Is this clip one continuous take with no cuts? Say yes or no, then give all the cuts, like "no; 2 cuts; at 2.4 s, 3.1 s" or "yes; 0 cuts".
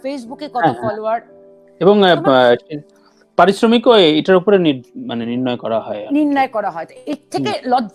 yes; 0 cuts